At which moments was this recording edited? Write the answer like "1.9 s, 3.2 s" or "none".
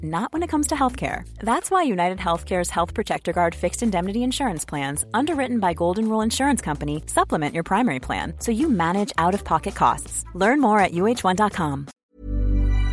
11.9 s